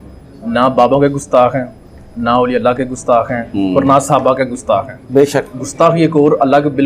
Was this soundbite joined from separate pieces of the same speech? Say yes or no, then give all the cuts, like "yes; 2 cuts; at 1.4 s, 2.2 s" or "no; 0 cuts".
no; 0 cuts